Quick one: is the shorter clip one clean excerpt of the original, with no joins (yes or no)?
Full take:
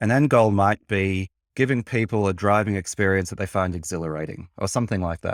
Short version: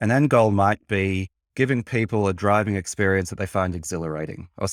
yes